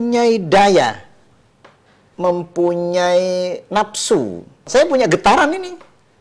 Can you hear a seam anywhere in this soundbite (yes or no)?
yes